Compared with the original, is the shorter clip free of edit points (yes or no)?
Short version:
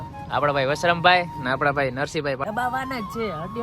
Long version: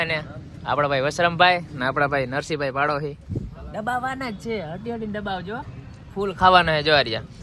no